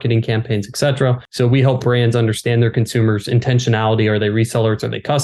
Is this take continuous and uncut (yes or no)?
no